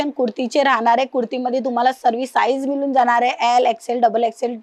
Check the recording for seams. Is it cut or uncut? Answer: uncut